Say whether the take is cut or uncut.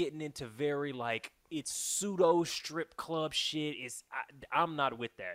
uncut